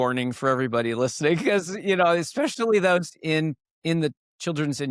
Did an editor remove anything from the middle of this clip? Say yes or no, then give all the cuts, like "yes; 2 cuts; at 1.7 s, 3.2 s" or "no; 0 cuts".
no; 0 cuts